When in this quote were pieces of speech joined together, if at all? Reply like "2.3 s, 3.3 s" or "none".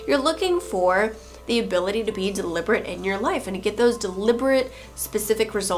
none